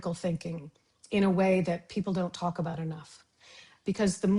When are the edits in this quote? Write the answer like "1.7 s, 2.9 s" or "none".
none